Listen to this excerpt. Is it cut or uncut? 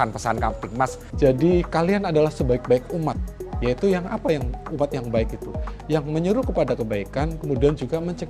cut